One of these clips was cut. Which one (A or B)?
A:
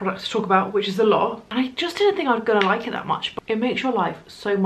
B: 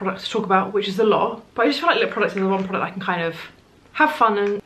A